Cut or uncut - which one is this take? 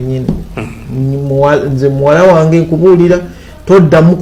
uncut